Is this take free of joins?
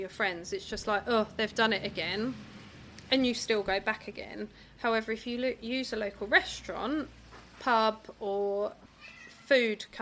yes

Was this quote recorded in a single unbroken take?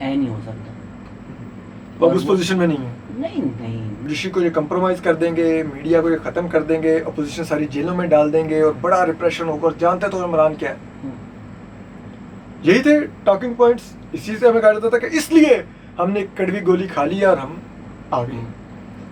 no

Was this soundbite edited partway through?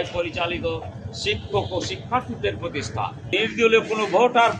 yes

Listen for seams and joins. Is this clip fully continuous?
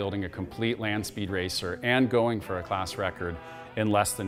yes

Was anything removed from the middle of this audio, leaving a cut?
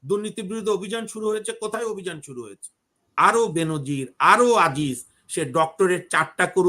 yes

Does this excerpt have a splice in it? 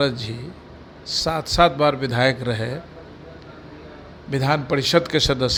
no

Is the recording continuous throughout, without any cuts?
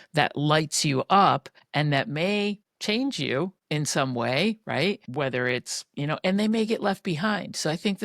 no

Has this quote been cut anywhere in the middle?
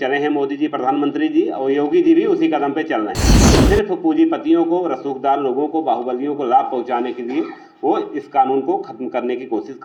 no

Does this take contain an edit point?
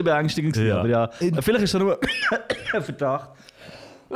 no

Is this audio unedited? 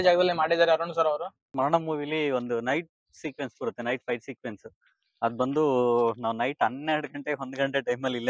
no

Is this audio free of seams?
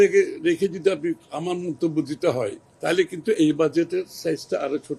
no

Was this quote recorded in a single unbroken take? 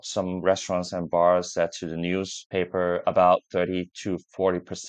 yes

